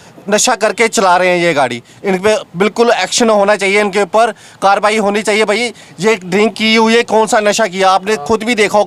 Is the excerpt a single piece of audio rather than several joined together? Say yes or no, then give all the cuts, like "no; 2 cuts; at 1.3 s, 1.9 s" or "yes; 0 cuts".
yes; 0 cuts